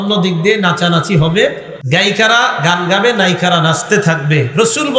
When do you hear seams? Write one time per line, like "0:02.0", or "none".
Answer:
0:01.7

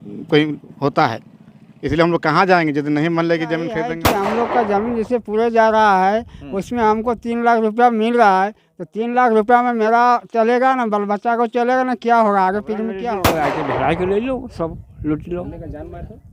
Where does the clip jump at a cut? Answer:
0:04.0
0:13.1

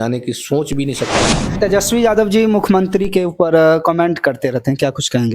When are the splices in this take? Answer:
0:01.5

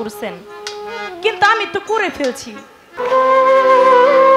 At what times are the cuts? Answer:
0:03.0

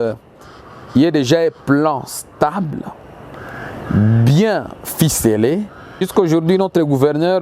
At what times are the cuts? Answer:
0:06.1

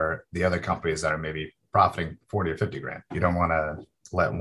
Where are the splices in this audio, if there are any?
0:03.1

